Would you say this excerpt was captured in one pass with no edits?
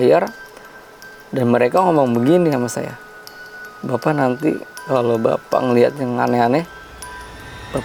yes; 0 cuts

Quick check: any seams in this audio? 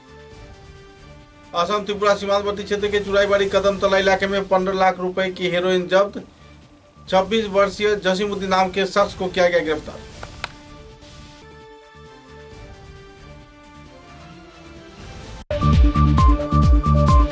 yes; 1 cut; at 1.1 s

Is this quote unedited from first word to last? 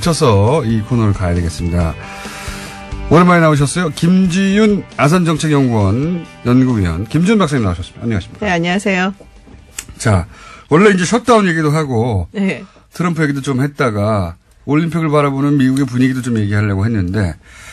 yes; 0 cuts

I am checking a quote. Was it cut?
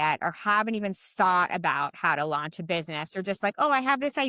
no; 0 cuts

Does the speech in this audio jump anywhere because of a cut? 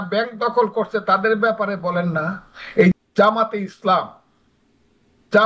yes; 1 cut; at 2.9 s

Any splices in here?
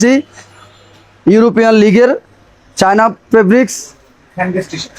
no; 0 cuts

